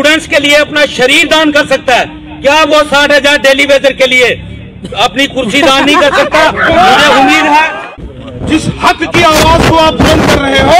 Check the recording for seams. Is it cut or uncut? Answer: cut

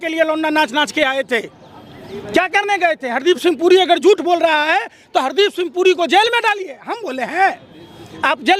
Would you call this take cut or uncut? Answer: uncut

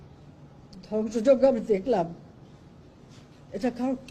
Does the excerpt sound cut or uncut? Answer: uncut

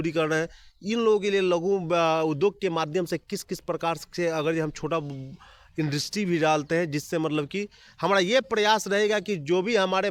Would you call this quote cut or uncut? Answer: uncut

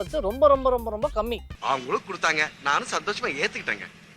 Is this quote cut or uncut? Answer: cut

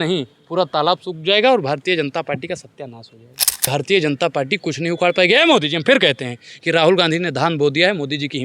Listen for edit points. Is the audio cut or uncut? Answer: cut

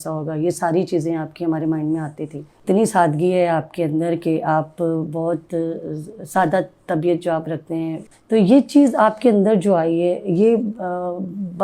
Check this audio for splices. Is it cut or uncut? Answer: cut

